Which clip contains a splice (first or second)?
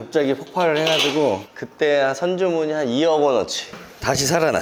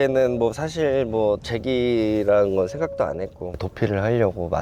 second